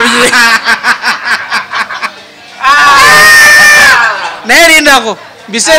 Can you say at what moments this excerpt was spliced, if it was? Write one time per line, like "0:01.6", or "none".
none